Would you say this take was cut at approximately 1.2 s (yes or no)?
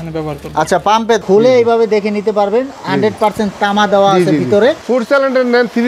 yes